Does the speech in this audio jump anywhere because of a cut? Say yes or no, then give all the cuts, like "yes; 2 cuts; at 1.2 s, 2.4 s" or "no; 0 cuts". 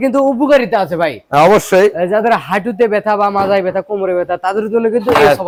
no; 0 cuts